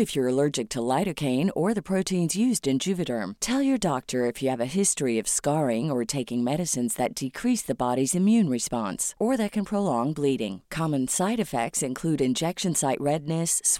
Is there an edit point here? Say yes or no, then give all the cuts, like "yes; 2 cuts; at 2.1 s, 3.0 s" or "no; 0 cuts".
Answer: no; 0 cuts